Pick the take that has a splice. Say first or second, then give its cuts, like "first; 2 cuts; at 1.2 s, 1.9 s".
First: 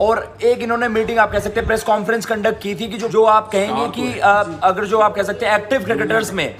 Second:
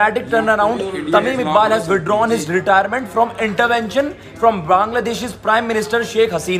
first; 1 cut; at 2.9 s